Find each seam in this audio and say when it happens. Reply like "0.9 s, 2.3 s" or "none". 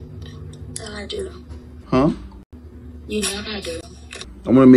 3.8 s